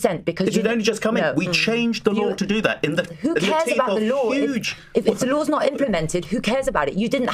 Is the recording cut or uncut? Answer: uncut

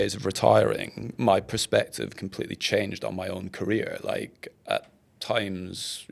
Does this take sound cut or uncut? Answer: uncut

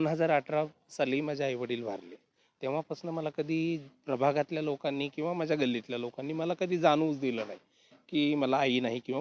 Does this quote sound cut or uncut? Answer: uncut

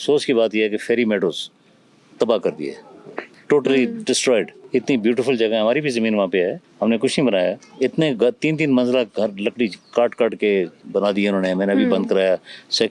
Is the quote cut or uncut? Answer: uncut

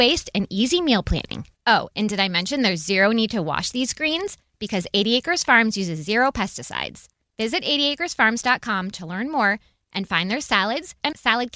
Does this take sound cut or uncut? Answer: uncut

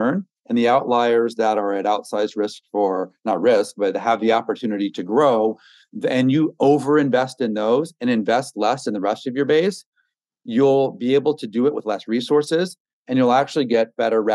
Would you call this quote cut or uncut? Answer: uncut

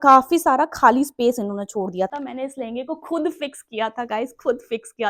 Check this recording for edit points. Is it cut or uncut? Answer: cut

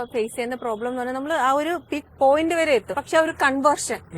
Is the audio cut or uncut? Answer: cut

